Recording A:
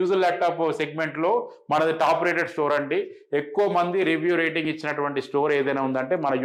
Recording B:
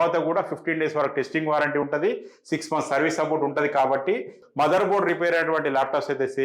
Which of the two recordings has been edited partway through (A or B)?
B